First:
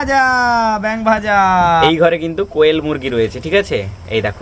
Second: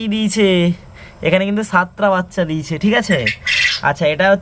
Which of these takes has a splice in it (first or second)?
first